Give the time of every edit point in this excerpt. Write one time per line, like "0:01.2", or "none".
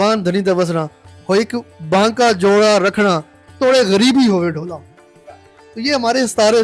none

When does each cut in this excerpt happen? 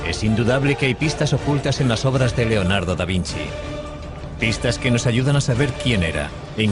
0:02.3

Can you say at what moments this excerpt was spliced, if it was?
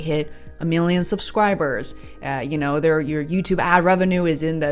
none

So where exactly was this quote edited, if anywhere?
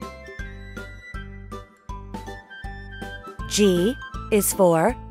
0:02.8
0:04.1

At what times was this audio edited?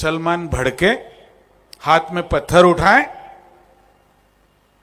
none

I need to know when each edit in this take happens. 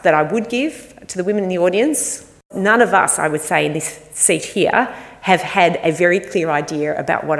0:02.5

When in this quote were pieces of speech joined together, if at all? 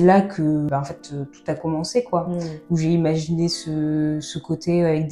none

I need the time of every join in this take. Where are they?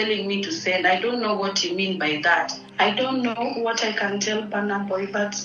0:02.6

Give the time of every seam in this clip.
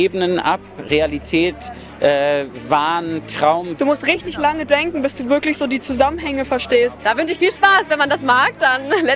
0:03.7
0:07.0

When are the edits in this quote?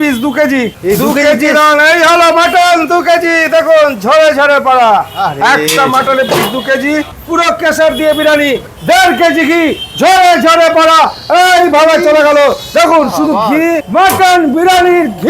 0:00.8
0:07.1
0:08.7
0:13.8

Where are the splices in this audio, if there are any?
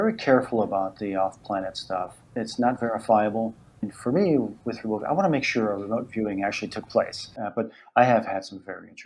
0:02.2
0:03.9
0:07.2

